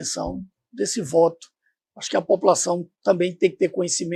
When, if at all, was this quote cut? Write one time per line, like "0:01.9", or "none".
none

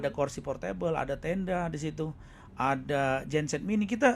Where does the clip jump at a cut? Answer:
none

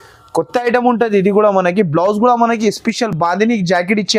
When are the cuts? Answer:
none

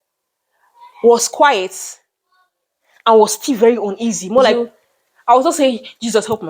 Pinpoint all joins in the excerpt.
0:04.5

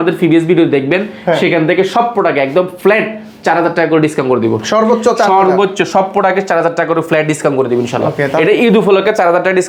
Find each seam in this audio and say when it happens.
none

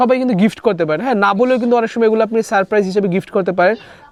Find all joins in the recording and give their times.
none

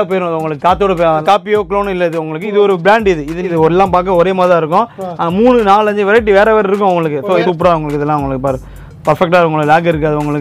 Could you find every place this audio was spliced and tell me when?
0:01.2
0:03.5
0:07.4

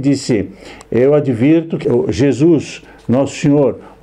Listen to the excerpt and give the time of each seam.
0:01.8

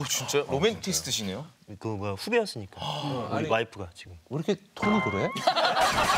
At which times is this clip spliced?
none

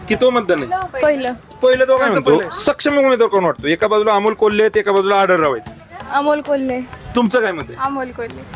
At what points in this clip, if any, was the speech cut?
0:02.1

